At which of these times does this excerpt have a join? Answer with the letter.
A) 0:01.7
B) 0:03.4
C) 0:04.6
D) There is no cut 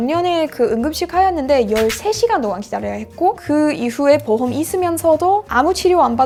D